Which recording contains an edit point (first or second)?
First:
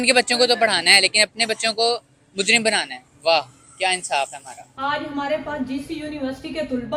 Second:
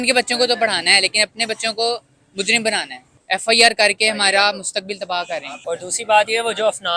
second